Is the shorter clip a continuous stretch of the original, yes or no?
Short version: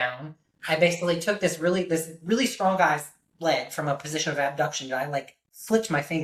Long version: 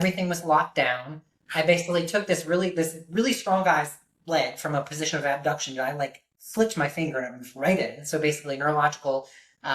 yes